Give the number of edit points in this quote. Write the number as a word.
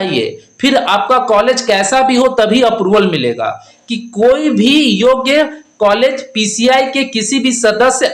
one